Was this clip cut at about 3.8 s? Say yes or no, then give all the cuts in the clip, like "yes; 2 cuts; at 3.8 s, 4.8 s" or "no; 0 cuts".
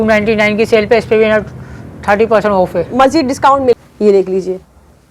yes; 1 cut; at 3.8 s